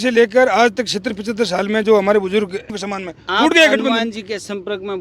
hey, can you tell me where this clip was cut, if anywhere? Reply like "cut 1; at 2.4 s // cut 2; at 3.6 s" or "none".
cut 1; at 2.8 s